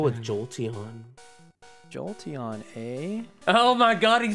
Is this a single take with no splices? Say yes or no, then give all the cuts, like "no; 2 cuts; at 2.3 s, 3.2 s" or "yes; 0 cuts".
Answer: yes; 0 cuts